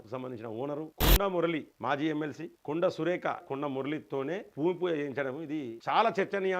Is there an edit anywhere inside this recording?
yes; 6 cuts; at 0.9 s, 1.7 s, 2.5 s, 3.4 s, 4.5 s, 5.7 s

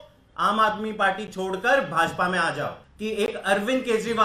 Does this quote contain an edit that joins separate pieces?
yes; 1 cut; at 2.9 s

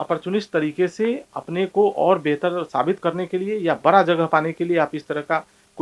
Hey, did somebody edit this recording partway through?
no; 0 cuts

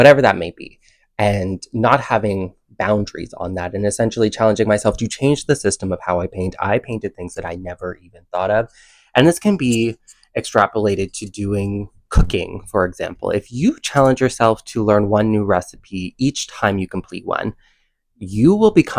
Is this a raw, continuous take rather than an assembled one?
yes; 0 cuts

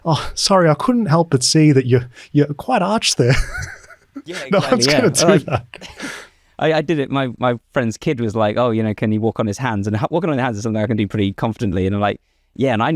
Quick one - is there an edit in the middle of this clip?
no; 0 cuts

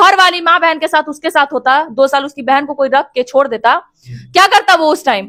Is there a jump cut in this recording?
no; 0 cuts

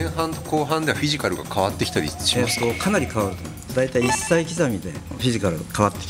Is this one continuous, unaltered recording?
no; 2 cuts; at 3.7 s, 5.1 s

